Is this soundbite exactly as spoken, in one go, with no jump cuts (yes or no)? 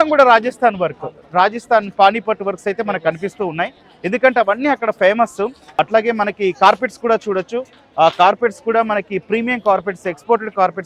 yes